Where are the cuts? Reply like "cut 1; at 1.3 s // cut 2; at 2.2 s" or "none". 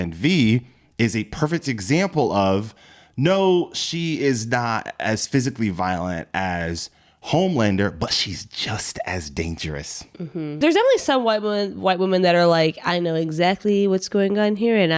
cut 1; at 10.6 s

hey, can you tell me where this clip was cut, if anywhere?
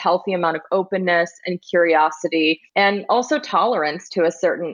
cut 1; at 2.6 s

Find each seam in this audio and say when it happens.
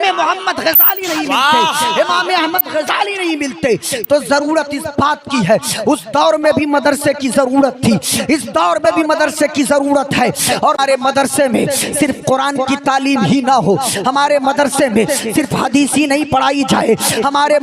cut 1; at 10.8 s

